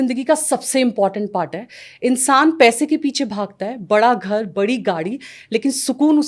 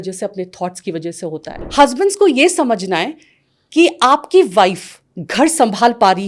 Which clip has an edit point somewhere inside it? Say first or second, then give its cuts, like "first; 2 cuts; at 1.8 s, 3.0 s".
second; 1 cut; at 1.6 s